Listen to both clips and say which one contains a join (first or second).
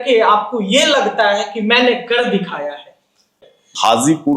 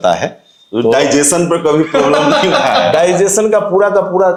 first